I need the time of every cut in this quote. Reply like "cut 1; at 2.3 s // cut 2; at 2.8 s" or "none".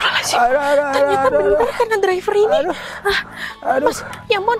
none